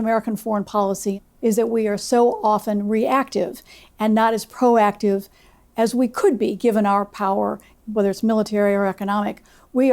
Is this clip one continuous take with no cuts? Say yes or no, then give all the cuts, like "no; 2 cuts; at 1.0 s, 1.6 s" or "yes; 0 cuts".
no; 2 cuts; at 1.2 s, 7.7 s